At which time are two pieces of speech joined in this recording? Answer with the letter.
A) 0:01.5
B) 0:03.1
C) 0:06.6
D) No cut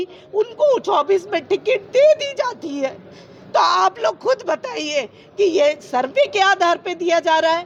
D